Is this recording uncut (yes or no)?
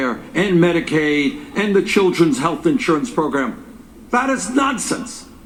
yes